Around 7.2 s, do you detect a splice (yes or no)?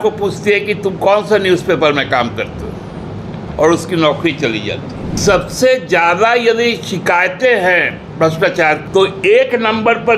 no